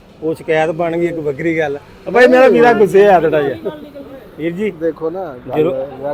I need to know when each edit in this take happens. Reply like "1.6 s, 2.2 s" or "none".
none

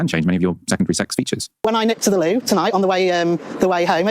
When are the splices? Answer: 1.6 s

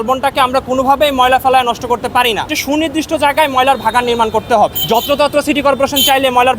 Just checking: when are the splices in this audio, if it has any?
2.5 s, 4.8 s

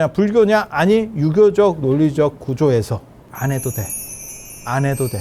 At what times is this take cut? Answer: none

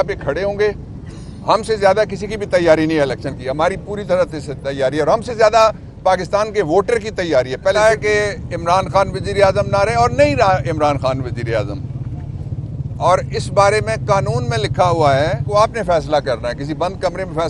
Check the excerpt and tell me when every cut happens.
7.8 s, 15.4 s

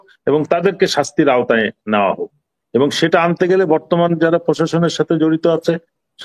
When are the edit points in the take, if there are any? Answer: none

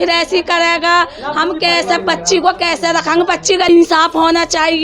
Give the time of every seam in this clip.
3.7 s

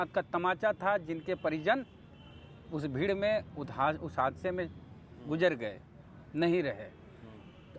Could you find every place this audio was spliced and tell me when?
none

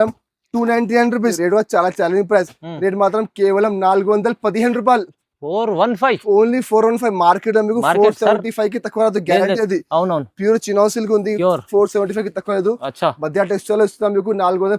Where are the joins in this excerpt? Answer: 1.4 s

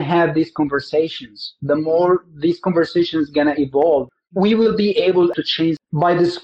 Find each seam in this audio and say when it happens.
4.1 s, 5.3 s

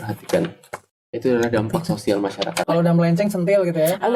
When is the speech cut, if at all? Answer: 2.6 s

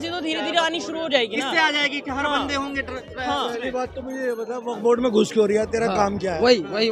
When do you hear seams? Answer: none

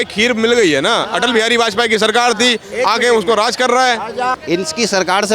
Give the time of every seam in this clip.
4.4 s

